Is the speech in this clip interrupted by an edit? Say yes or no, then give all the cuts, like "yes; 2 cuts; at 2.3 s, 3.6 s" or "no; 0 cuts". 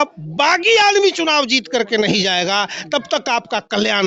no; 0 cuts